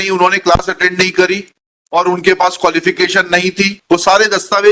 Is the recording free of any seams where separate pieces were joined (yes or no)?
yes